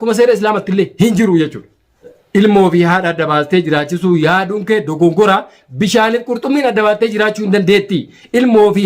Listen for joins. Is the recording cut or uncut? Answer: cut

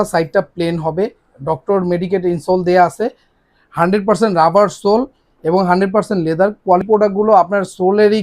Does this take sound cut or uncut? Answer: cut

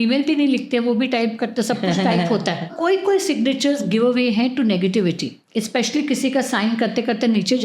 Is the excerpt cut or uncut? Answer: cut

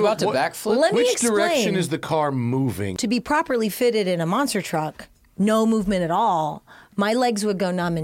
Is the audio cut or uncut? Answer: cut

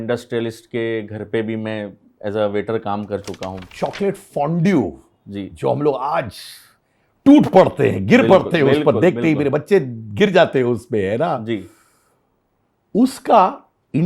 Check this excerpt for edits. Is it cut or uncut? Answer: cut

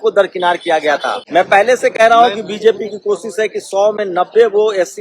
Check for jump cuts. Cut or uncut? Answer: cut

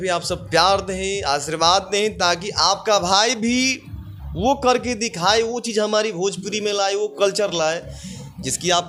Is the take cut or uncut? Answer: uncut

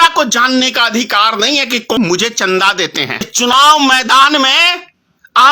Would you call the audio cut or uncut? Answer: cut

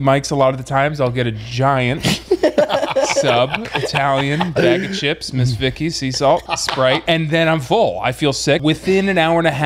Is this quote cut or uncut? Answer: cut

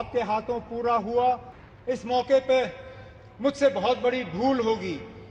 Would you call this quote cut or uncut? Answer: cut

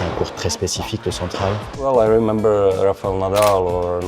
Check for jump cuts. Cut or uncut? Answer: cut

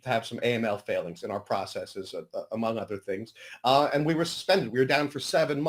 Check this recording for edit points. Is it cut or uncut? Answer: uncut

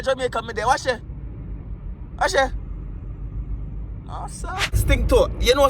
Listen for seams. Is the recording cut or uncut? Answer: cut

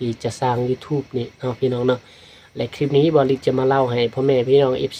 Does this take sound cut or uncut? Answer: uncut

